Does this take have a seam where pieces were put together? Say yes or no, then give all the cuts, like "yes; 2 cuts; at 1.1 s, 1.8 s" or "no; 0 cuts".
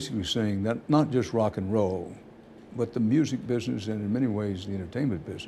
no; 0 cuts